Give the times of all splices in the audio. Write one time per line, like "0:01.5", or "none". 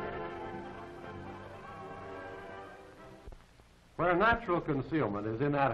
0:00.9